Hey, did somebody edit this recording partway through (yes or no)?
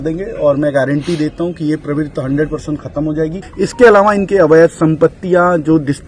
yes